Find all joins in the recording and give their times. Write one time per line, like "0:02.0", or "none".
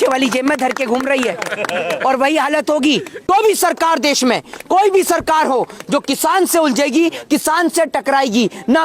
0:03.2